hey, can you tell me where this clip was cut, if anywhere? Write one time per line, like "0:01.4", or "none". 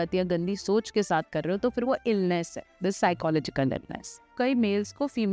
0:04.3